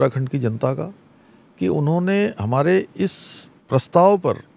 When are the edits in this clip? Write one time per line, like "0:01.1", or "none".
0:03.5